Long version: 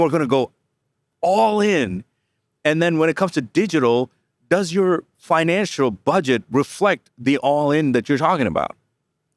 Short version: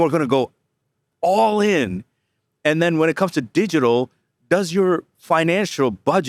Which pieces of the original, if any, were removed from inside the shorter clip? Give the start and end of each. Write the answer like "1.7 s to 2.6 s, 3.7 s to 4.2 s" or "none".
none